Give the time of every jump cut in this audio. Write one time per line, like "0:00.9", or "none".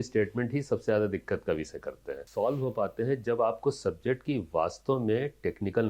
0:02.1